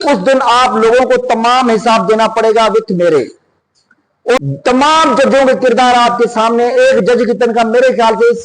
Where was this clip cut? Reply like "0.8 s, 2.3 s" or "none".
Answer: 4.4 s